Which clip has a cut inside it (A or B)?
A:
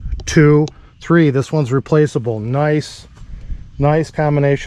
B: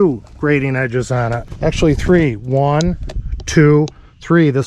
B